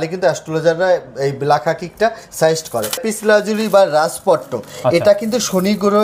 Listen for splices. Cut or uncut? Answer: cut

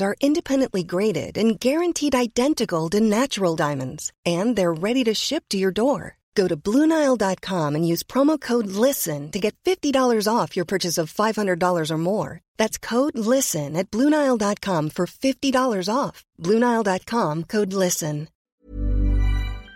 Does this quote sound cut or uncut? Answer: cut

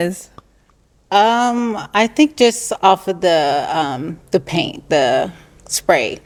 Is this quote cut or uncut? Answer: uncut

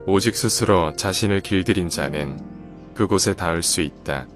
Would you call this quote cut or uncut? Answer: uncut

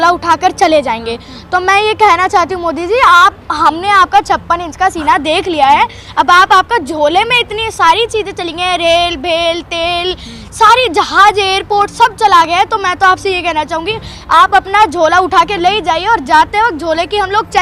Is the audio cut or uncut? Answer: uncut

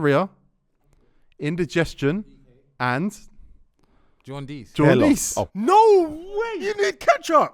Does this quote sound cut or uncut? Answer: cut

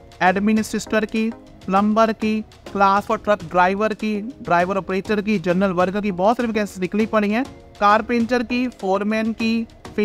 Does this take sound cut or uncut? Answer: cut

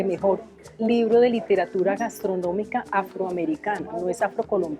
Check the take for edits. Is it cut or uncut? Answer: uncut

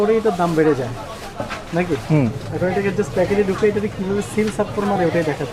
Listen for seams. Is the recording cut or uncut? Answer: uncut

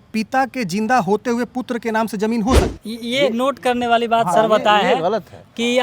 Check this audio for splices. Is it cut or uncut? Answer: cut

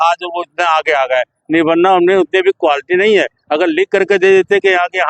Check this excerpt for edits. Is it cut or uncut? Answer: uncut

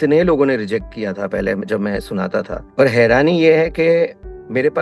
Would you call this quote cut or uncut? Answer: cut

